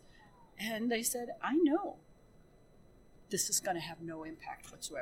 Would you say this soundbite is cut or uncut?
uncut